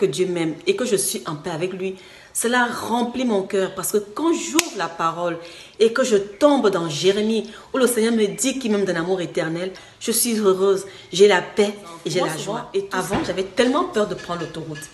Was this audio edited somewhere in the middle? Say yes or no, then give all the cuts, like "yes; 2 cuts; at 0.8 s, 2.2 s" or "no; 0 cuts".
yes; 2 cuts; at 9.9 s, 12.7 s